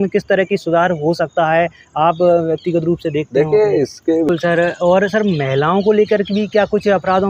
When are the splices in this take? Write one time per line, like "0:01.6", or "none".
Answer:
0:04.3